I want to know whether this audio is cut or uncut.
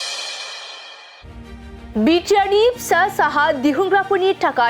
cut